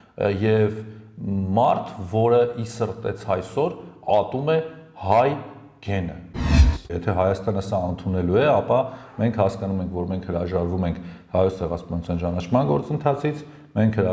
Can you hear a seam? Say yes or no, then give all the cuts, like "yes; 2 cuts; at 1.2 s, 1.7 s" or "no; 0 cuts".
yes; 1 cut; at 6.7 s